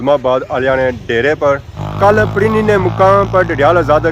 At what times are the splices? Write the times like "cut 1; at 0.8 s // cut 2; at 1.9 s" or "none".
cut 1; at 1.7 s